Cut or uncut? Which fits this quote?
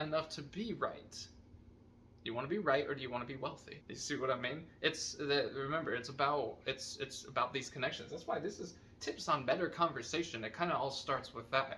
cut